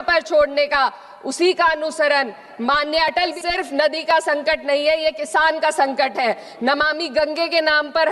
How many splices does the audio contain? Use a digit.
1